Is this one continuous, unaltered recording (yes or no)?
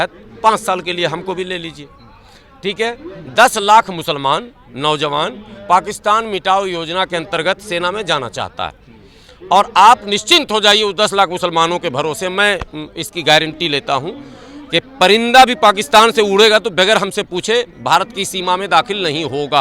yes